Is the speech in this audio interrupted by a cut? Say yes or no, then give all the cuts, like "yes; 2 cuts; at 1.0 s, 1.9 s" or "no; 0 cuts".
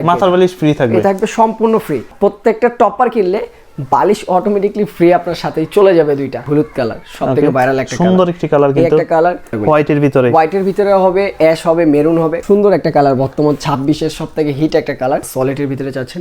yes; 5 cuts; at 2.1 s, 6.4 s, 9.6 s, 12.4 s, 15.3 s